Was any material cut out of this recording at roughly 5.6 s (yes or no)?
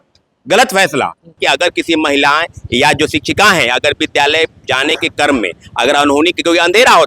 no